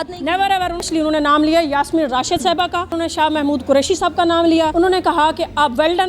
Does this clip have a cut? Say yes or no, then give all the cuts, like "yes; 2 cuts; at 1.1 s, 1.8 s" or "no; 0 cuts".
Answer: yes; 3 cuts; at 0.9 s, 2.9 s, 4.7 s